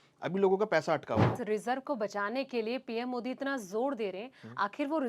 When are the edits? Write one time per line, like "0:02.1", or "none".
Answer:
0:01.3